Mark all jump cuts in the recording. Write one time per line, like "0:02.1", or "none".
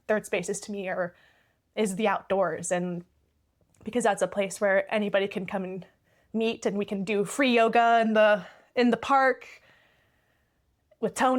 none